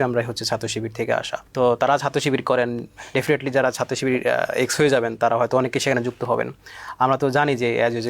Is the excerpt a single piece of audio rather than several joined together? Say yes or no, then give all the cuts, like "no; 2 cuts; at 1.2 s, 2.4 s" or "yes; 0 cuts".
no; 1 cut; at 1.4 s